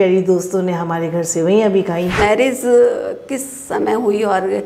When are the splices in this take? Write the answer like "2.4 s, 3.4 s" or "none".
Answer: 2.2 s